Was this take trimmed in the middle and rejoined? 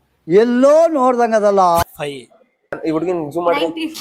yes; 1 cut; at 2.8 s

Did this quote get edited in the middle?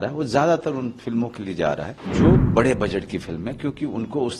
yes; 1 cut; at 2.0 s

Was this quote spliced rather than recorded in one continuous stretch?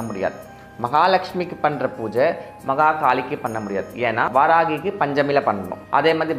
yes; 1 cut; at 4.3 s

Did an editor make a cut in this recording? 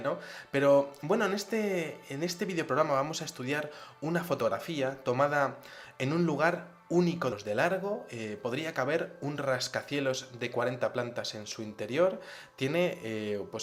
no; 0 cuts

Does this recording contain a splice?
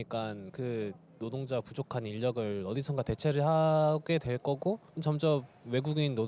no; 0 cuts

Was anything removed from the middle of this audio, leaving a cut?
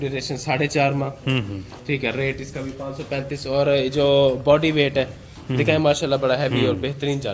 no; 0 cuts

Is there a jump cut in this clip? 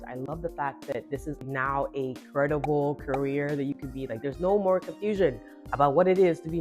yes; 1 cut; at 1.4 s

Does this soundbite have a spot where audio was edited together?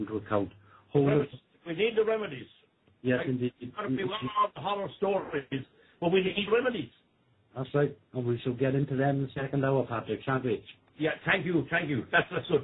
yes; 1 cut; at 6.8 s

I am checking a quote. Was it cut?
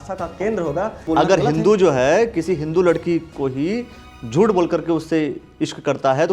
yes; 1 cut; at 1.0 s

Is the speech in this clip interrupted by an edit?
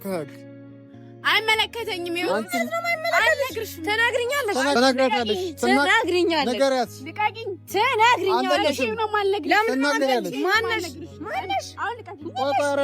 yes; 1 cut; at 4.7 s

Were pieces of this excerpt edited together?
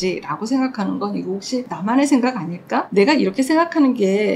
no; 0 cuts

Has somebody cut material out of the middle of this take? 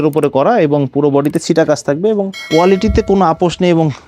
yes; 1 cut; at 2.4 s

